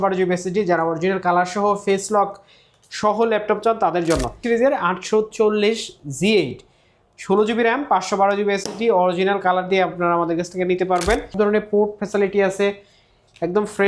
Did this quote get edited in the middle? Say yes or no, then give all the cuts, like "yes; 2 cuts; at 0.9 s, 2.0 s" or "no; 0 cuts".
yes; 2 cuts; at 4.4 s, 11.3 s